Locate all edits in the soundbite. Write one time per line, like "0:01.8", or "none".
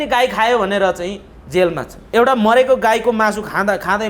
0:01.9